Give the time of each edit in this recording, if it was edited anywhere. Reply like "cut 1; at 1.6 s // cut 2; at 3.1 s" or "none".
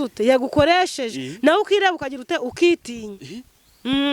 none

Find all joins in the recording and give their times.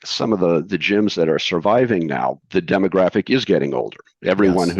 cut 1; at 2.4 s

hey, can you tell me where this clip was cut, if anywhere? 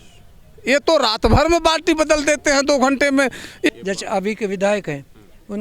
cut 1; at 3.7 s

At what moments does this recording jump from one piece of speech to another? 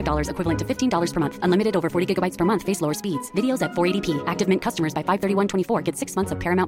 none

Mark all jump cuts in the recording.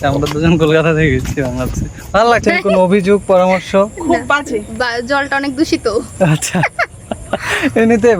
cut 1; at 2.4 s

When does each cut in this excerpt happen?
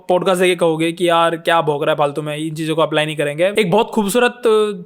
cut 1; at 3.5 s

